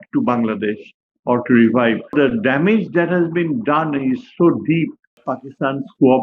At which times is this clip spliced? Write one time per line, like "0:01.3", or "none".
0:02.1
0:05.3